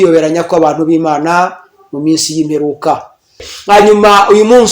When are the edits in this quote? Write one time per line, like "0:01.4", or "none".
0:03.5